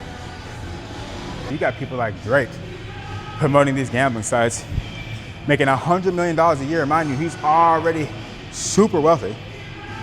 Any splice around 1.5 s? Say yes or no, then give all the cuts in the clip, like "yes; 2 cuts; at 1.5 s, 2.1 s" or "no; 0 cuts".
yes; 1 cut; at 1.5 s